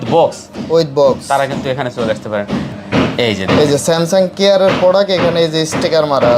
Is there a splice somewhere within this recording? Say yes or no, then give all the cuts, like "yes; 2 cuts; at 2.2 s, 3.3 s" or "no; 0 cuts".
yes; 1 cut; at 2.8 s